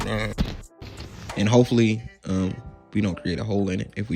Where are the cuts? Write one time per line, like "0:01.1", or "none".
0:01.2